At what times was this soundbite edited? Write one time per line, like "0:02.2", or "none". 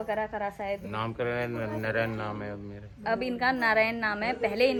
none